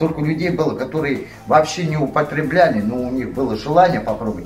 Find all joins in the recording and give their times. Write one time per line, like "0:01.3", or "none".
none